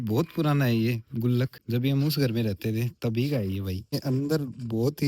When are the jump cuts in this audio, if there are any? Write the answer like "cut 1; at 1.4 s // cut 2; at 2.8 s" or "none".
cut 1; at 1.6 s // cut 2; at 3.9 s